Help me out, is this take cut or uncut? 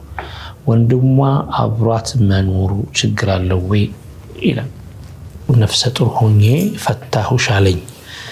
cut